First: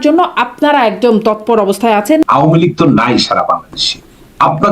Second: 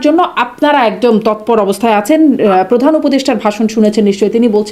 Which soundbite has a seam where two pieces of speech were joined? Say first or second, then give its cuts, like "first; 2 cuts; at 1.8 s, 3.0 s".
first; 1 cut; at 2.2 s